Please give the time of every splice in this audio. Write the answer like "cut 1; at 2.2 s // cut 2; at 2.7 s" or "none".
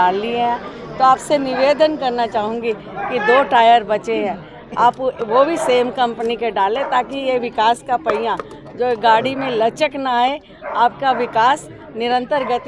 none